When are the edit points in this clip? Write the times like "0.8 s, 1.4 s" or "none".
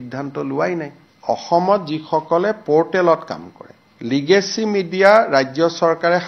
none